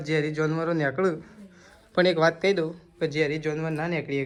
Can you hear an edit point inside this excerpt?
no; 0 cuts

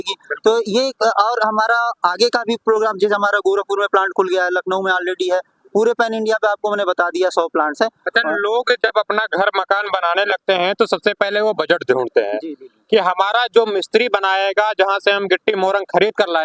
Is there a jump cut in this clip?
no; 0 cuts

